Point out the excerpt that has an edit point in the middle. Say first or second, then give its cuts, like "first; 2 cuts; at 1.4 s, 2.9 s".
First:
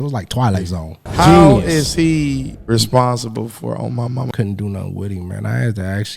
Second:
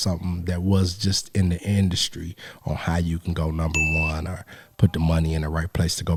first; 3 cuts; at 1.0 s, 2.5 s, 4.3 s